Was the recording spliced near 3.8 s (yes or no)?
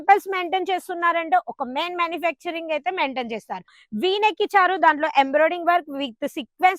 yes